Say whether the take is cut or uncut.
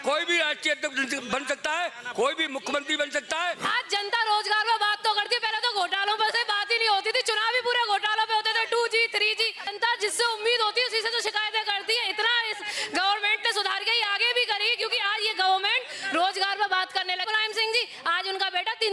cut